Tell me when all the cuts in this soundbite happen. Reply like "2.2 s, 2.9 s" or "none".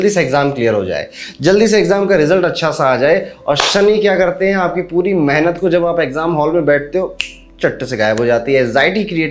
none